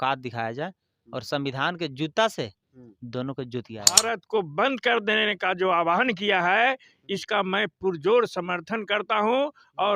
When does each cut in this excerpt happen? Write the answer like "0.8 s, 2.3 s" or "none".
3.9 s